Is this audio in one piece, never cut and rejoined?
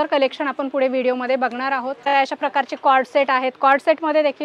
no; 1 cut; at 2.0 s

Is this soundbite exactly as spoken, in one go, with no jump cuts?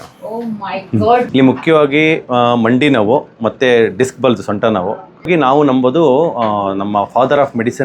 no; 2 cuts; at 1.3 s, 5.3 s

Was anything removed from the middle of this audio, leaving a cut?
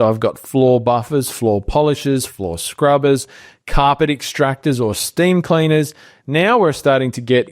no; 0 cuts

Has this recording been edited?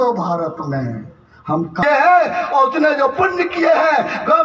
yes; 1 cut; at 1.8 s

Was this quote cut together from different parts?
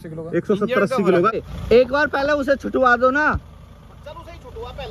yes; 1 cut; at 1.4 s

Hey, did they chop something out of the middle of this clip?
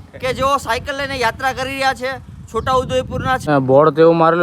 yes; 1 cut; at 3.4 s

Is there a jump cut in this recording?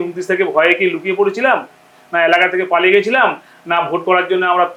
no; 0 cuts

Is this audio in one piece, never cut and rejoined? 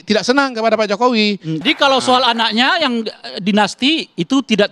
no; 1 cut; at 1.6 s

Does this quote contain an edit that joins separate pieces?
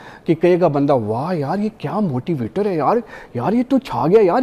no; 0 cuts

